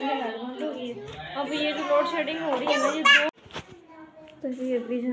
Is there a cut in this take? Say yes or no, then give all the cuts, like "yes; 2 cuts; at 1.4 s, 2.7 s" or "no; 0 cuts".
yes; 1 cut; at 3.3 s